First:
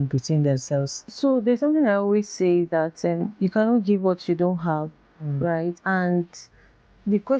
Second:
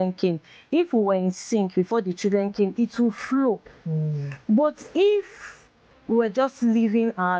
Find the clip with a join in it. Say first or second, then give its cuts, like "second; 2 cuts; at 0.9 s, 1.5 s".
first; 2 cuts; at 1.1 s, 5.8 s